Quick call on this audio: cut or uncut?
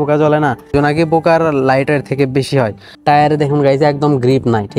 cut